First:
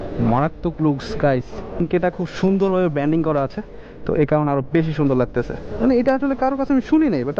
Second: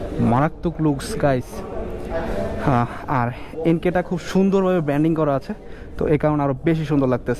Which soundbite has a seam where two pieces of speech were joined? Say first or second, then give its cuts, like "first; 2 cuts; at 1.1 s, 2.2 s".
first; 2 cuts; at 1.8 s, 5.6 s